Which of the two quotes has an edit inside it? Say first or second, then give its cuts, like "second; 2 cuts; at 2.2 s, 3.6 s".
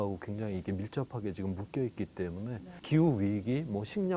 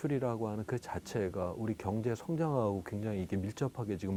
first; 1 cut; at 2.8 s